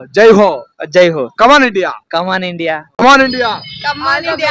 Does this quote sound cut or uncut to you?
cut